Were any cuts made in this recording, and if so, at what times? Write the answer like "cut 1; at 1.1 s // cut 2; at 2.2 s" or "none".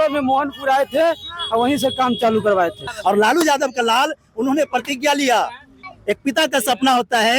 cut 1; at 2.9 s // cut 2; at 5.9 s